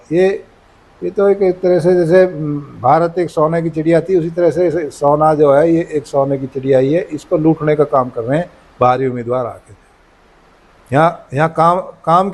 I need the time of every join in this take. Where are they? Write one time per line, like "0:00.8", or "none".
none